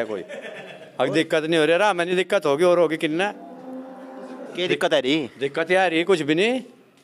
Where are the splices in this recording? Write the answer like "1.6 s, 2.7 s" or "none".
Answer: none